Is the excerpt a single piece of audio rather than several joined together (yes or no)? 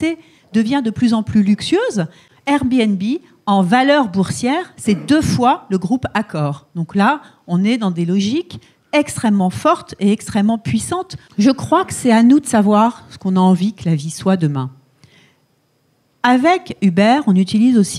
no